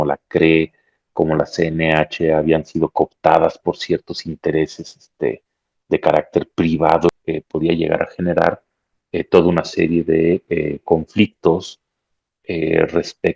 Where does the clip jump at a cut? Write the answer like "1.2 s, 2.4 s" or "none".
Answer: 7.1 s